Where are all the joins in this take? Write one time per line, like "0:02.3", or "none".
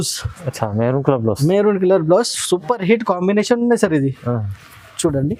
none